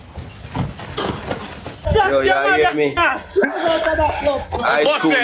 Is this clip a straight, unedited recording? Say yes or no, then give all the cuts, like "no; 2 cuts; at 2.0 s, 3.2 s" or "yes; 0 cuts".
no; 1 cut; at 1.8 s